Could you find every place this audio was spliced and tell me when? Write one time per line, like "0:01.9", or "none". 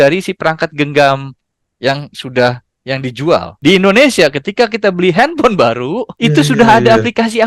0:03.5
0:06.0